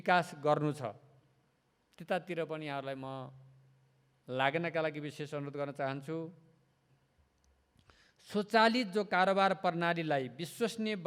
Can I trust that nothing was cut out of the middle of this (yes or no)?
no